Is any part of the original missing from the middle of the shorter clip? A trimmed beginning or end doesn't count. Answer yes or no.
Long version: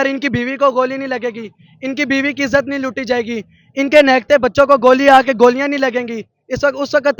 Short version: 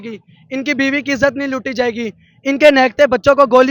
no